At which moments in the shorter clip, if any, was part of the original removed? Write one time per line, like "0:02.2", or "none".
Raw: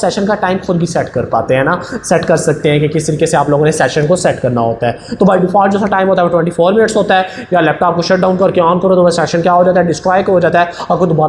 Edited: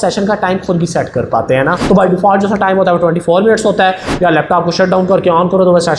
0:01.8